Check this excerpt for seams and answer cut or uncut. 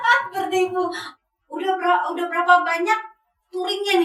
cut